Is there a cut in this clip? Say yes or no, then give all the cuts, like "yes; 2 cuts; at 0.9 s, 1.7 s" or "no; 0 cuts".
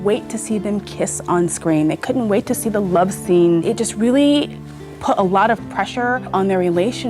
yes; 2 cuts; at 3.6 s, 6.3 s